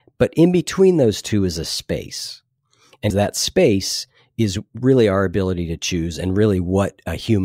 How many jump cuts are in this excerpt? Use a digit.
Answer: 1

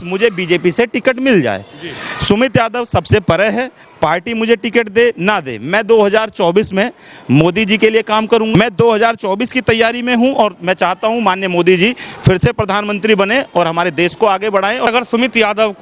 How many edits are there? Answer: 2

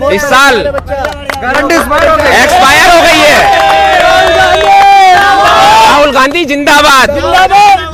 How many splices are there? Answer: 0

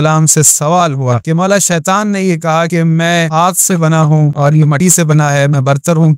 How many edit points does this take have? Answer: 3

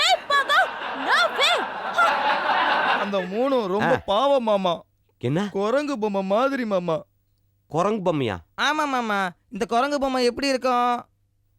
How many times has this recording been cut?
1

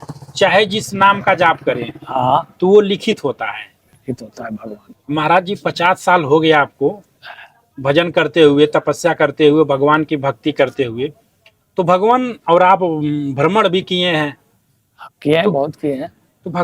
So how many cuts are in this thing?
1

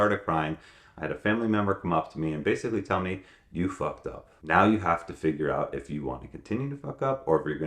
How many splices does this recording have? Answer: 1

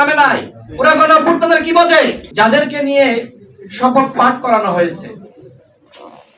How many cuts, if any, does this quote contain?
1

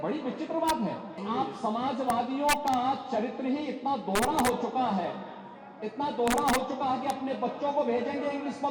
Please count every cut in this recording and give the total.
1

